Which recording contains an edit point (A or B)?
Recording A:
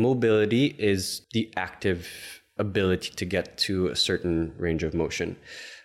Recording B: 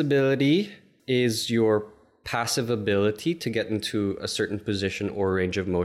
A